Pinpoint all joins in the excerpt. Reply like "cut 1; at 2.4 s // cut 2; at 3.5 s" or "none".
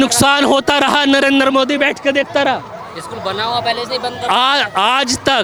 none